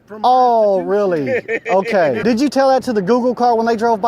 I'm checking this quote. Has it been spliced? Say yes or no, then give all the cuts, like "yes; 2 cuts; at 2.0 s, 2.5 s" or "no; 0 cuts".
yes; 1 cut; at 2.2 s